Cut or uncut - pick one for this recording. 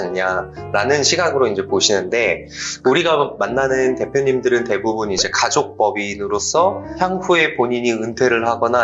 cut